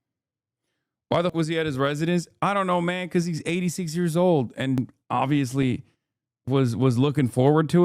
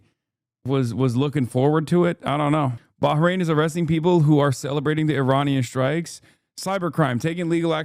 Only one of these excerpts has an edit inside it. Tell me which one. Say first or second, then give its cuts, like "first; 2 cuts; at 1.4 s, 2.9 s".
first; 2 cuts; at 1.3 s, 4.9 s